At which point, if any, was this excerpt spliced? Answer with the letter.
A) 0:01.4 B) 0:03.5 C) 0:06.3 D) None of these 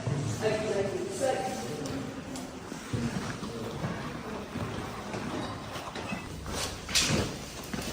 C